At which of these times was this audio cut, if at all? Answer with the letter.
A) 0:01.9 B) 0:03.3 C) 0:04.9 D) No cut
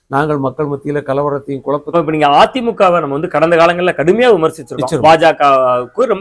A